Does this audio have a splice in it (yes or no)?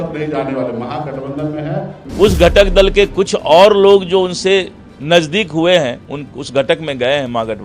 yes